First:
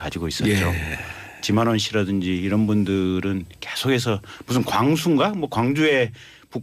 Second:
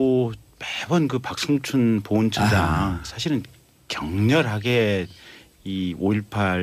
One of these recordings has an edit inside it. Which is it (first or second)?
first